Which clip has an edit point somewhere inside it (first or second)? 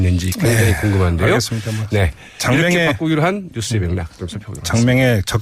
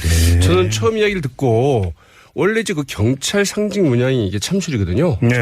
second